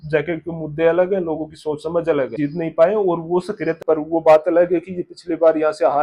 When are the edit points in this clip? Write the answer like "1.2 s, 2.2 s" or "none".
2.3 s, 3.8 s